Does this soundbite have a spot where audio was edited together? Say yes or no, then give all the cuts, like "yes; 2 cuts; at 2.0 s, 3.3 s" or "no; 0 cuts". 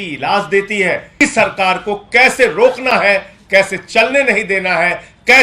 yes; 1 cut; at 1.2 s